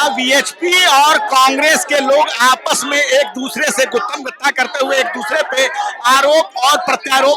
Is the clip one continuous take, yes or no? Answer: yes